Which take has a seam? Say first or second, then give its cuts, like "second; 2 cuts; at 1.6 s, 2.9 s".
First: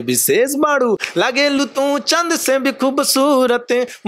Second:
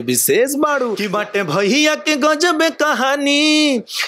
second; 1 cut; at 1.0 s